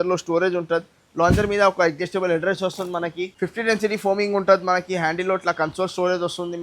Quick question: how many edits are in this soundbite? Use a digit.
1